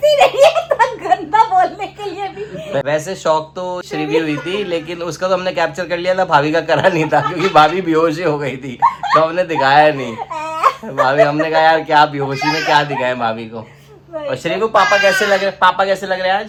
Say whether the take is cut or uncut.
uncut